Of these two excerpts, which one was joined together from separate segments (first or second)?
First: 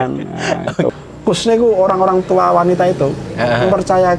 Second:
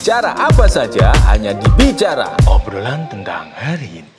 first